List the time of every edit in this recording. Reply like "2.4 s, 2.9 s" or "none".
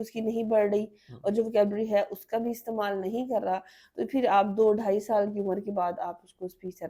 none